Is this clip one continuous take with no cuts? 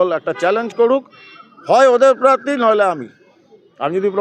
yes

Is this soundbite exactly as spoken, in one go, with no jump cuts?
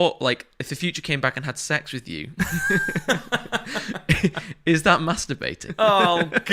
no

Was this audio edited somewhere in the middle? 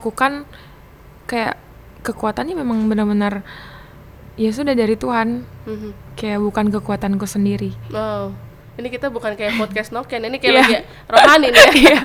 no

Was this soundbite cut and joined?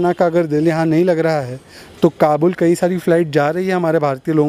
no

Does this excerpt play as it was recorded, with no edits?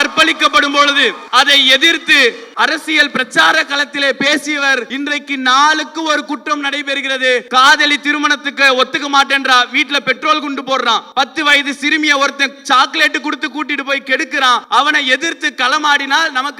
no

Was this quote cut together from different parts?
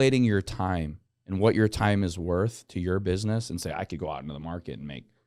no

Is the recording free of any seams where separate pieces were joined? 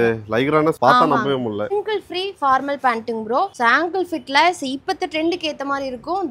no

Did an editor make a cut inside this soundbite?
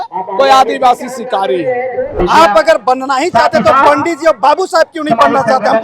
yes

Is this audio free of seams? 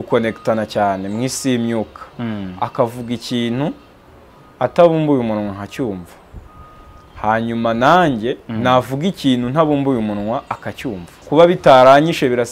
no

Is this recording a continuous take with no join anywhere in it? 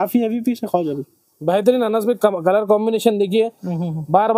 yes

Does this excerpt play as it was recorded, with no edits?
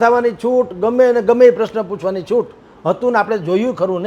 yes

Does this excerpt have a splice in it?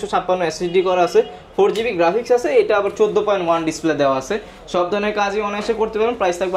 no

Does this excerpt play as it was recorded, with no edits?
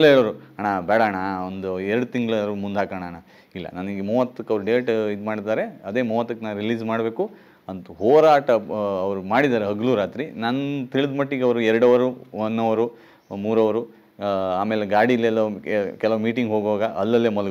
yes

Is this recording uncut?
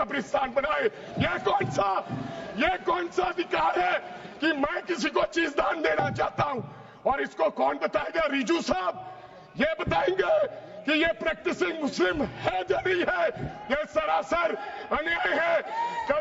yes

